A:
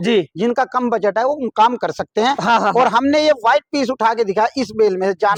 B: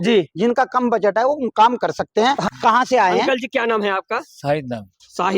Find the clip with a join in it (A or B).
B